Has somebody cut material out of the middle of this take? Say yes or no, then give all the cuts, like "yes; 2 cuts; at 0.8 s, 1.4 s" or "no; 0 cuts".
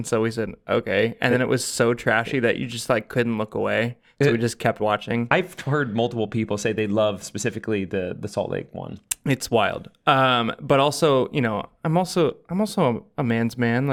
no; 0 cuts